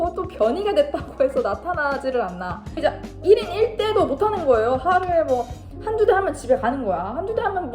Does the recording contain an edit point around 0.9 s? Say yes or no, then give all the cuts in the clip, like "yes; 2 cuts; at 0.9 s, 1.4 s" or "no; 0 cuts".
no; 1 cut; at 2.7 s